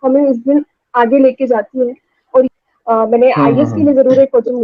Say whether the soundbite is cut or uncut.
cut